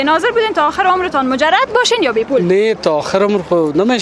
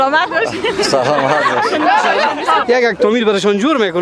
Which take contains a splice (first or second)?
second